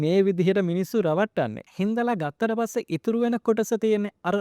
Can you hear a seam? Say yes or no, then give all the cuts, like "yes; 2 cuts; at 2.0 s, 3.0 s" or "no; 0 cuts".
yes; 1 cut; at 1.6 s